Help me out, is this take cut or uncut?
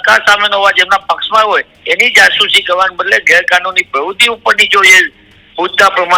uncut